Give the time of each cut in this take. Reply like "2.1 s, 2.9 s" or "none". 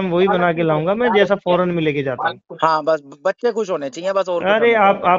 none